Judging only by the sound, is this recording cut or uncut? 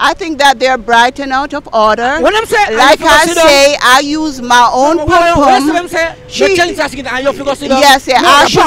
uncut